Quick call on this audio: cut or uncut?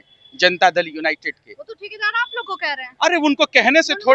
uncut